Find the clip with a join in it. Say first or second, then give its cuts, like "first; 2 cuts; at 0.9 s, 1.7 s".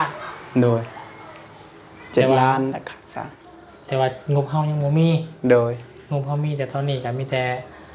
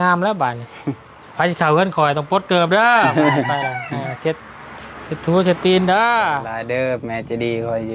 second; 1 cut; at 6.5 s